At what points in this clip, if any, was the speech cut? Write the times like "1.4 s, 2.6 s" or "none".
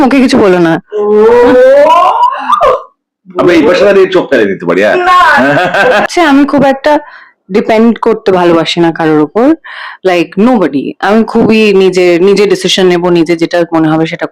6.1 s